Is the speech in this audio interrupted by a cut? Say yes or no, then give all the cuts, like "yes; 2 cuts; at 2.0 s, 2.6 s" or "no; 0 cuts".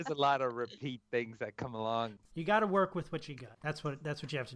yes; 1 cut; at 2.2 s